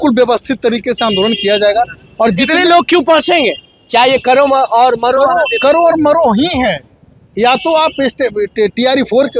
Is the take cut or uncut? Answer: uncut